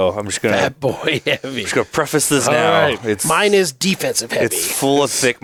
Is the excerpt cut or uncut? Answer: uncut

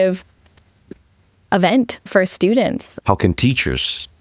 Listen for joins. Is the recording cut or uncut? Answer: cut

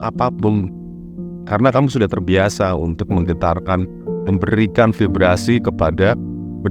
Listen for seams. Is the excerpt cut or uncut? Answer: uncut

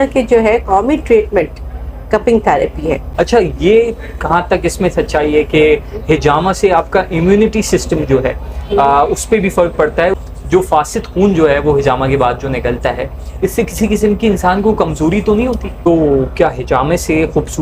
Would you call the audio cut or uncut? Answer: cut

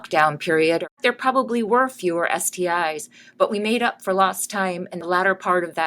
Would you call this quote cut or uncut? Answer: cut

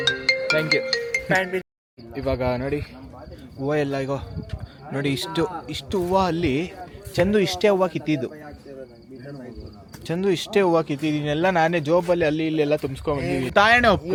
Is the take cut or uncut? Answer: uncut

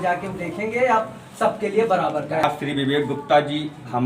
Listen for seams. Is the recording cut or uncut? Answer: cut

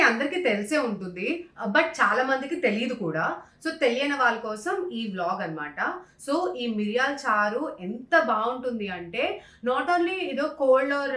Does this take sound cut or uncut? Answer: uncut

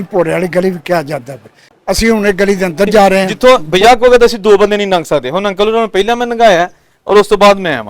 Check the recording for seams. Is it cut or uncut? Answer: cut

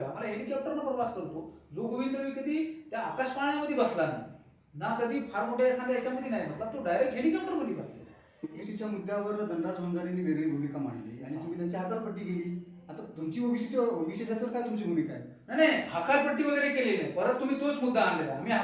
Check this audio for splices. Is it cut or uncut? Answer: cut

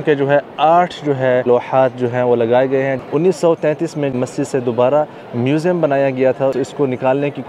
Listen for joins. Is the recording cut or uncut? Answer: cut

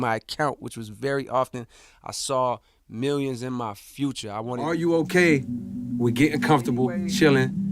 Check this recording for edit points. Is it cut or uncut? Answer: cut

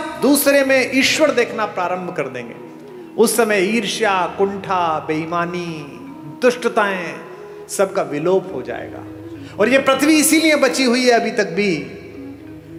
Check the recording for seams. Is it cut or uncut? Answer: uncut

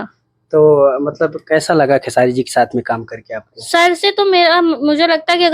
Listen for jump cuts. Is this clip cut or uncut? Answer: uncut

